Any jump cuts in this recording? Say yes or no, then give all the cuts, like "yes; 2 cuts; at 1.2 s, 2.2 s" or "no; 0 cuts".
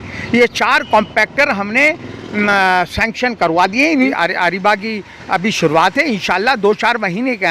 yes; 1 cut; at 4.1 s